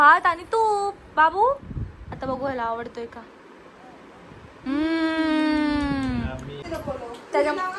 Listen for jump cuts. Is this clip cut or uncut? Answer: cut